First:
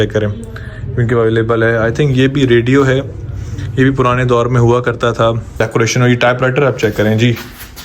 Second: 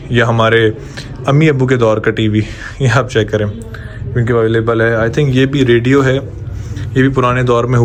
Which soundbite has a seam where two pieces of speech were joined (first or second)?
first